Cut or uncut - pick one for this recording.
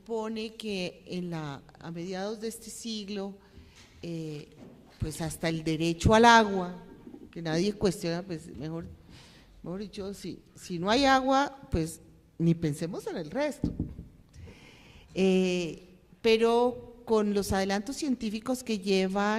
uncut